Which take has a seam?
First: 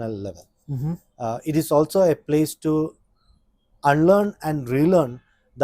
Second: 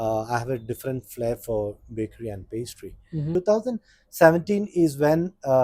second; 1 cut; at 3.3 s

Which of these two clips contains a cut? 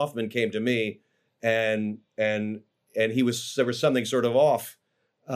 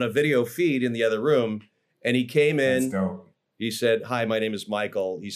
second; 1 cut; at 3.3 s

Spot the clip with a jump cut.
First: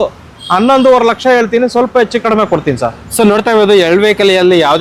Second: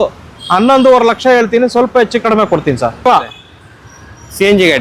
second; 1 cut; at 3.1 s

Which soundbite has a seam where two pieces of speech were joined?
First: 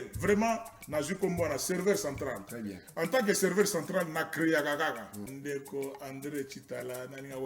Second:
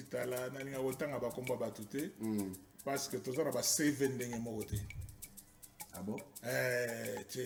first; 1 cut; at 5.3 s

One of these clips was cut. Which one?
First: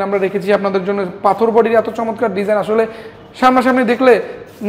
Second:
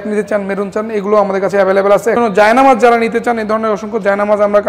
second; 1 cut; at 2.2 s

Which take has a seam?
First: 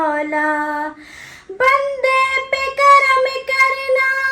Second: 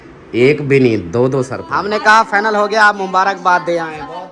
second; 1 cut; at 1.6 s

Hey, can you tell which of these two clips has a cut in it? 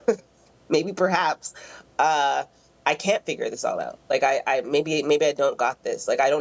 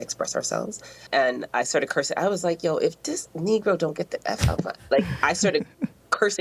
second; 1 cut; at 1.1 s

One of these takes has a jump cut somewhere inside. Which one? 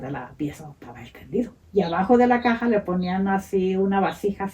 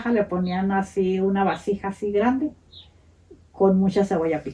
first; 1 cut; at 1.6 s

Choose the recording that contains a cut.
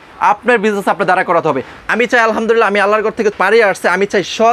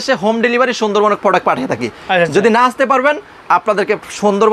first; 2 cuts; at 1.7 s, 3.3 s

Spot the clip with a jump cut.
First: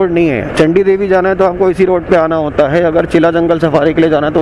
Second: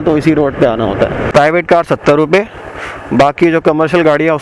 second; 1 cut; at 1.2 s

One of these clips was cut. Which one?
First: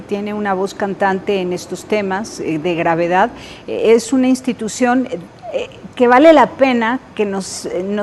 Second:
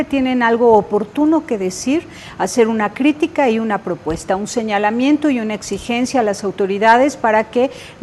first; 1 cut; at 4.7 s

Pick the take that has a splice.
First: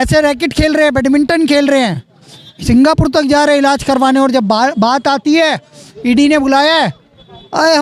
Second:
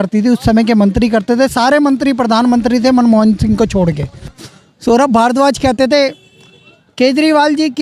second; 1 cut; at 4.4 s

